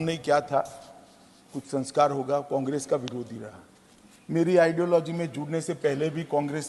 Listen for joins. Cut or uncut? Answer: uncut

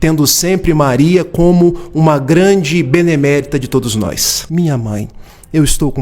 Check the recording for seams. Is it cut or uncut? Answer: cut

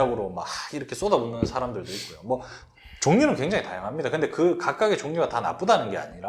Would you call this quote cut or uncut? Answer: uncut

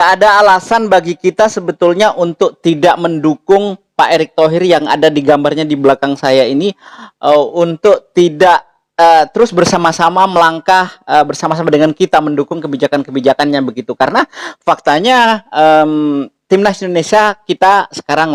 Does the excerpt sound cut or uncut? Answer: uncut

